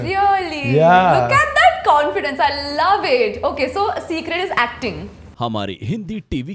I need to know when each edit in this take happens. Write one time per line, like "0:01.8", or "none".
0:05.2

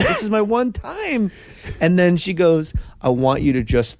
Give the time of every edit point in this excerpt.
0:01.4

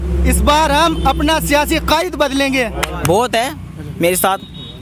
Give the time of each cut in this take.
0:03.0

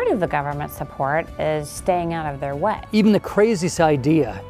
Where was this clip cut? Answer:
0:02.8

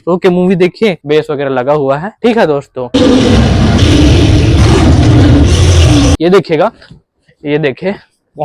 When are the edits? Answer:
0:01.0
0:02.3
0:06.1

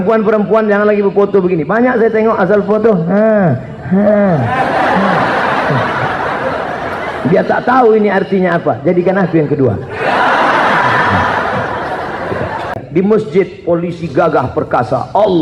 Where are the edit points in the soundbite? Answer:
0:12.8

